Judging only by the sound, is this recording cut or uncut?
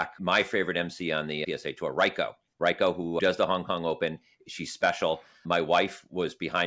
cut